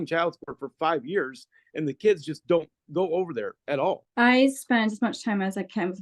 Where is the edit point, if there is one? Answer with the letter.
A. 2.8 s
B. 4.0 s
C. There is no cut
B